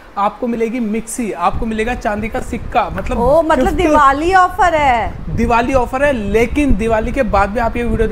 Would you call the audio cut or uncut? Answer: uncut